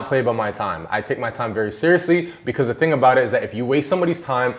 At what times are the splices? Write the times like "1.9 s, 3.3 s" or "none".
none